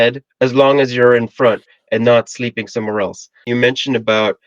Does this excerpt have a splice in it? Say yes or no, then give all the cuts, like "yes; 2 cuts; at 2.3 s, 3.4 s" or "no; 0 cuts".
yes; 1 cut; at 3.5 s